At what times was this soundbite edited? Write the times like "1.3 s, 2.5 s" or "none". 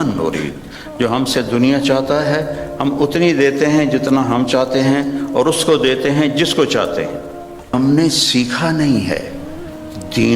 7.7 s